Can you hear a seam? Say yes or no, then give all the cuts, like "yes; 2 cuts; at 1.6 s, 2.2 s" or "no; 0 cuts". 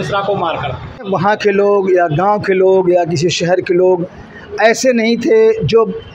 yes; 1 cut; at 1.1 s